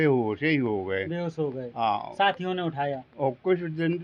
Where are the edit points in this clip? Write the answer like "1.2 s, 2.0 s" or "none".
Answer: none